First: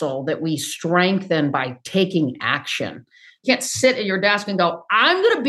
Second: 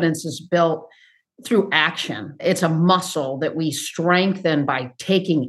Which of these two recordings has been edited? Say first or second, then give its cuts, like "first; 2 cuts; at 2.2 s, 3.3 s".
first; 1 cut; at 3.4 s